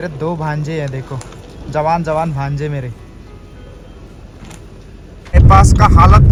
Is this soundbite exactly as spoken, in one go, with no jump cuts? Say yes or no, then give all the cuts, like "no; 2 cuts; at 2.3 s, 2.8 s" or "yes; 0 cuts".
yes; 0 cuts